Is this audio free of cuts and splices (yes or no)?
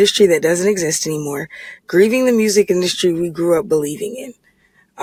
yes